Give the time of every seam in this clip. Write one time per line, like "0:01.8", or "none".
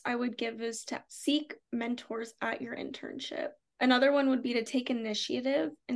0:01.0
0:03.6